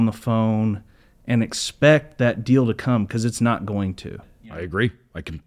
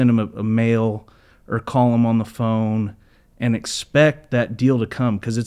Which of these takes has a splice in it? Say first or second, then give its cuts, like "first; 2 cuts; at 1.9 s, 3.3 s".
first; 1 cut; at 4.5 s